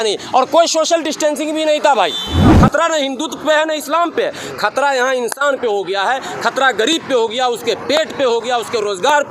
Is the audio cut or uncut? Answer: cut